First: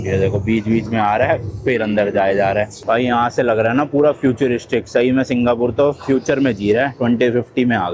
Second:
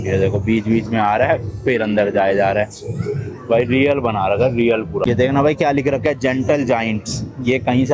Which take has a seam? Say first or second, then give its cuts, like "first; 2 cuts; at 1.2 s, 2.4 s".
first; 1 cut; at 2.8 s